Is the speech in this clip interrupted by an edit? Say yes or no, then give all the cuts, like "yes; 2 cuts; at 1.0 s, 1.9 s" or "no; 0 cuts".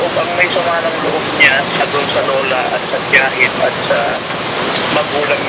no; 0 cuts